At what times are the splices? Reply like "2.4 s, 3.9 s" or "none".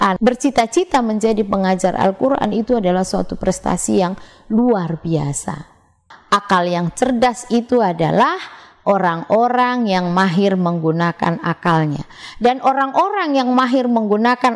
6.1 s